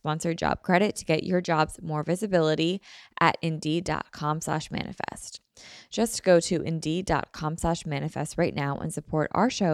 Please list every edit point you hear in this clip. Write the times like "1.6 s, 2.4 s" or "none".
none